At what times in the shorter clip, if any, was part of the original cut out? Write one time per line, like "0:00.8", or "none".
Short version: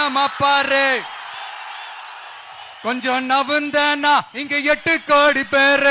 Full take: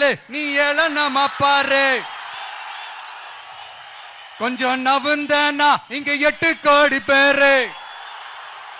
0:02.7